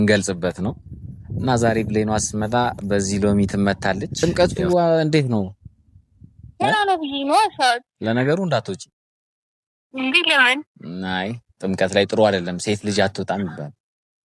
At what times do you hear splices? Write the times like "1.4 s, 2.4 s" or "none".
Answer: 4.2 s